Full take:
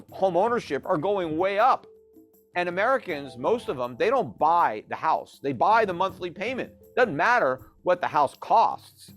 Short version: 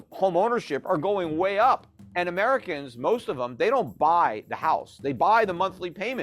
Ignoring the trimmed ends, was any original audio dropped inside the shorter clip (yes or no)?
yes